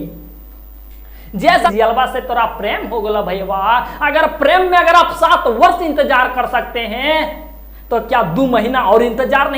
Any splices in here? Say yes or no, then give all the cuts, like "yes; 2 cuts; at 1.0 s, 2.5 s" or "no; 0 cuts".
yes; 1 cut; at 1.7 s